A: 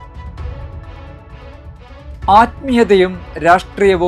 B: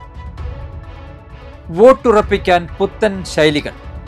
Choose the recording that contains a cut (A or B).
A